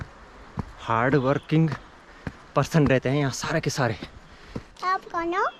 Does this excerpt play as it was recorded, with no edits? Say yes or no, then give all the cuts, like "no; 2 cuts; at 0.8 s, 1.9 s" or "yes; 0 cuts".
no; 1 cut; at 4.6 s